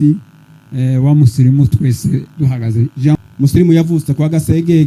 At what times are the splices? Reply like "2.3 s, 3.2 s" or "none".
3.1 s